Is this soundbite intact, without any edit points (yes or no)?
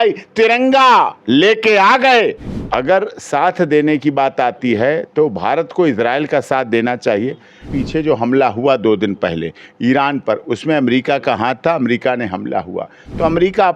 no